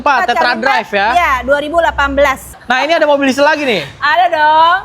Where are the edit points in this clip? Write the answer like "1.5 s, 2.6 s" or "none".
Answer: 2.6 s

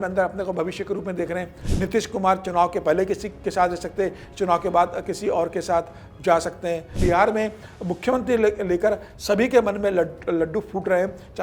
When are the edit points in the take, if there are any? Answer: 1.6 s, 6.9 s

